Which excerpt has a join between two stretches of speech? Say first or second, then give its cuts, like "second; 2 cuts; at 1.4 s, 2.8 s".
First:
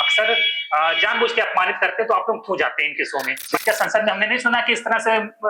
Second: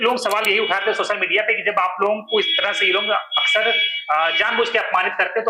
first; 1 cut; at 3.6 s